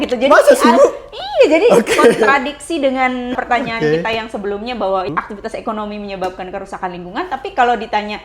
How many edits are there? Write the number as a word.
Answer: two